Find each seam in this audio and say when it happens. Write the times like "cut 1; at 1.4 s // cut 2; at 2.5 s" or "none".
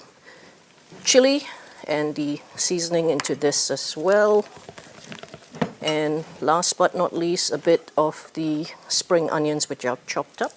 none